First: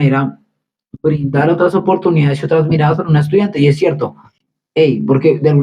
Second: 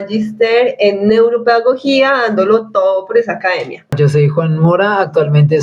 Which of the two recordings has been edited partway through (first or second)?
second